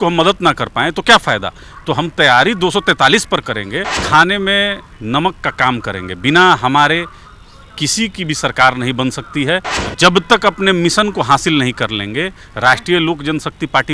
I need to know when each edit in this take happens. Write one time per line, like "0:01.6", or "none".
0:04.0
0:09.7